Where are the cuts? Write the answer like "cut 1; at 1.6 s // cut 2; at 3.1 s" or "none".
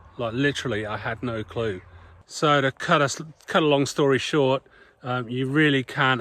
cut 1; at 2.1 s